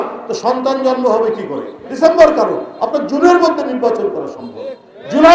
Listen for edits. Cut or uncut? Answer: cut